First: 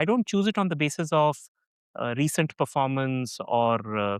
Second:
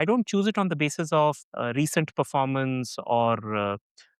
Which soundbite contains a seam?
second; 1 cut; at 1.5 s

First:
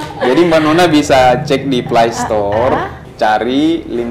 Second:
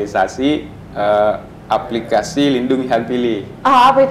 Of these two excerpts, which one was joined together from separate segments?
first; 1 cut; at 3.0 s

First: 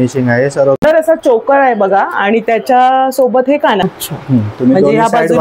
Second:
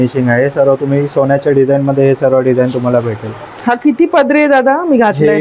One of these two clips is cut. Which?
first; 2 cuts; at 0.8 s, 3.8 s

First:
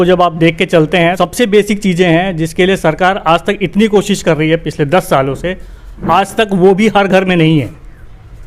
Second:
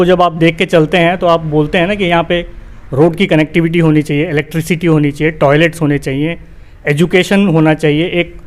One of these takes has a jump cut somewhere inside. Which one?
first; 1 cut; at 1.1 s

